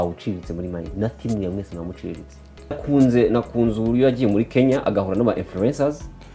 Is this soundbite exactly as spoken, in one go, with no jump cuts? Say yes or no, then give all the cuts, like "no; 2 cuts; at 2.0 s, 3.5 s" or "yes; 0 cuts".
no; 1 cut; at 2.8 s